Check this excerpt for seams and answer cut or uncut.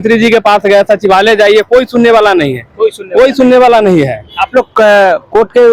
uncut